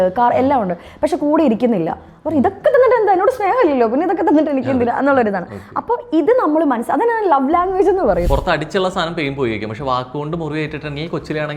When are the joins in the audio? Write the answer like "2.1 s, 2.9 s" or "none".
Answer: 8.3 s